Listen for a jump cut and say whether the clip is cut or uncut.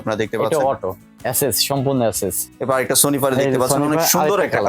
cut